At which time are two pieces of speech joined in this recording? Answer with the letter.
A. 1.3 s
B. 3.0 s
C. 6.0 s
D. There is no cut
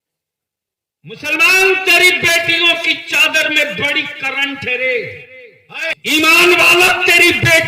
C